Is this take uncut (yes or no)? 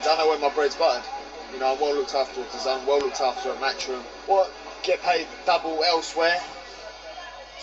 yes